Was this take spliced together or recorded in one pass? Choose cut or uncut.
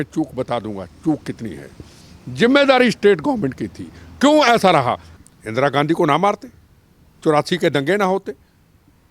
cut